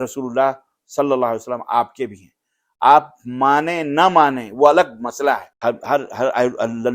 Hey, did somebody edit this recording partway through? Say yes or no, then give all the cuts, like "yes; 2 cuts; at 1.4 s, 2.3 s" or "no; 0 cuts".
yes; 1 cut; at 5.5 s